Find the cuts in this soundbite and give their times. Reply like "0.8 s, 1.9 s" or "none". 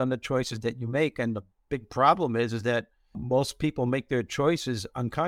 3.2 s